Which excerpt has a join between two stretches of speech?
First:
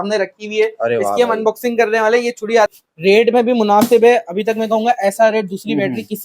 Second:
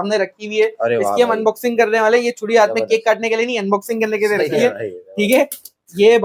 first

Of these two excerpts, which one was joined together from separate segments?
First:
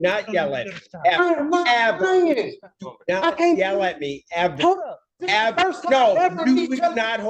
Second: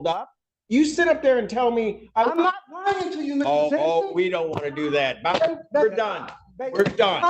second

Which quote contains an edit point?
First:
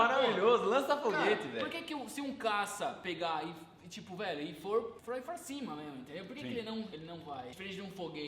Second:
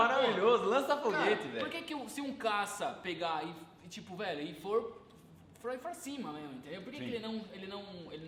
first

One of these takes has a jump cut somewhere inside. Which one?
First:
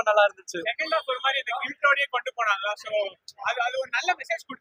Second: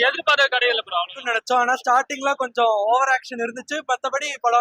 second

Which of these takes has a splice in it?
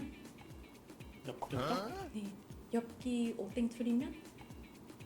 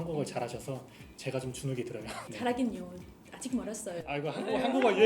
second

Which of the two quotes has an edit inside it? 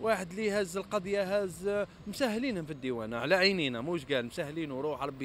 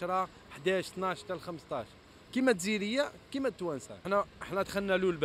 second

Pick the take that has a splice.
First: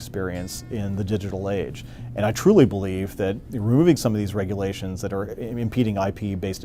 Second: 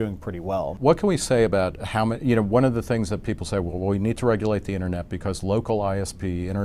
second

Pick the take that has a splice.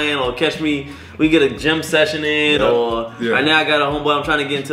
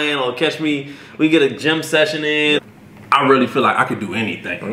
second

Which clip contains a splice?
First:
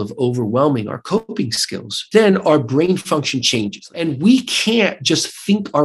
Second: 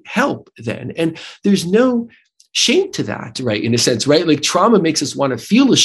first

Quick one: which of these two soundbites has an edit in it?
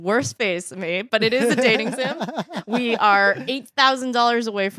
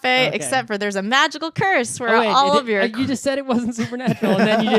second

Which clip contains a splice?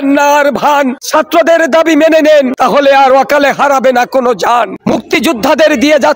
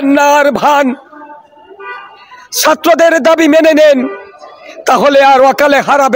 first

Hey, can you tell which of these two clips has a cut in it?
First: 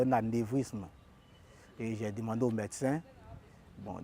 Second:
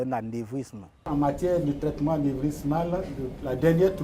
second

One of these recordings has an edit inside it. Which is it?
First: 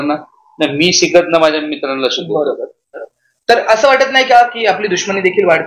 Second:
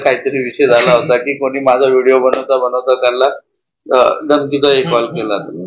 first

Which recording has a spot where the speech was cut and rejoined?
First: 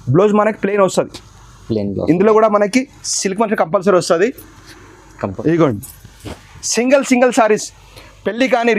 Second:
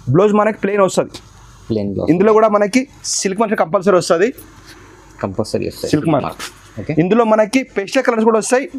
first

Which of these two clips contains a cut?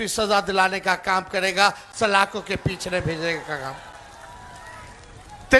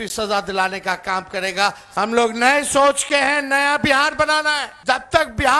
second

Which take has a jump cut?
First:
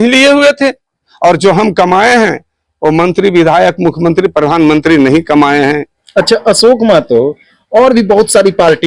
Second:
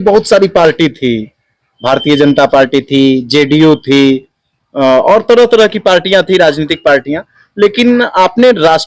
first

